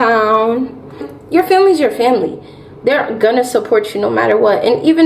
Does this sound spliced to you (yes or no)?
yes